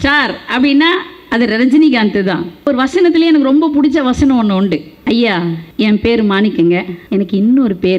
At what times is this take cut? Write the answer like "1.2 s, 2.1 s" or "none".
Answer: 2.7 s, 4.9 s, 5.6 s, 7.0 s